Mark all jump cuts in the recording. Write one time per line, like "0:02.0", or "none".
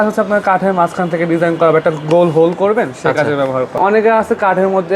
0:03.8